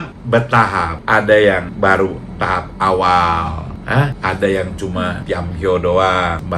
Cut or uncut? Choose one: uncut